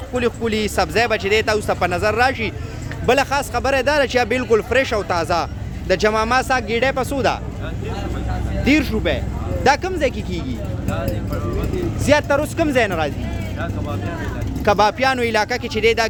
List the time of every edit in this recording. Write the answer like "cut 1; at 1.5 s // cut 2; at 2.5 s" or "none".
none